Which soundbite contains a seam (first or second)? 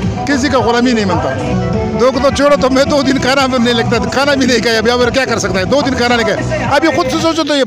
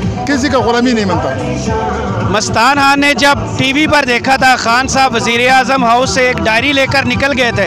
first